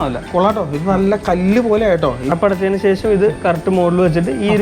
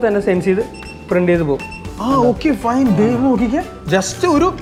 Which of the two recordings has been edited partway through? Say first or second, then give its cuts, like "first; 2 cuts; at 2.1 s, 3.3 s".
first; 1 cut; at 2.2 s